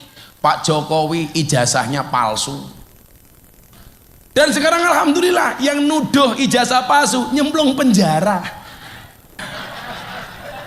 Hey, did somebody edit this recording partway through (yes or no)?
yes